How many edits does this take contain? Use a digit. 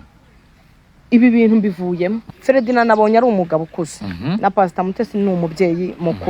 1